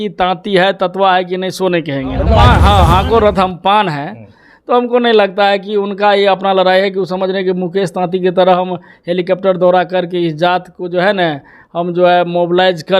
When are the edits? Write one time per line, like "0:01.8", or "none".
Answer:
0:02.4